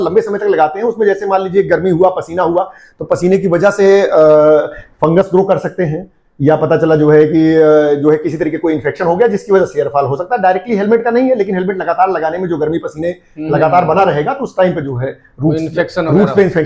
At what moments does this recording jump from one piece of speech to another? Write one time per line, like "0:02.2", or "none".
none